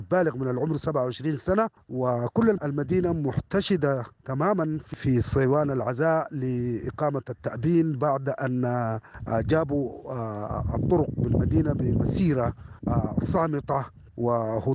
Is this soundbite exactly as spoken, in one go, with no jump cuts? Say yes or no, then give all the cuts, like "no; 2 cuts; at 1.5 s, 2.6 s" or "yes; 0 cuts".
no; 1 cut; at 2.6 s